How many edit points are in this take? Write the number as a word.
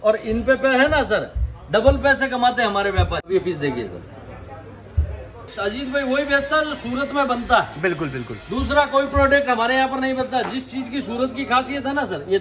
two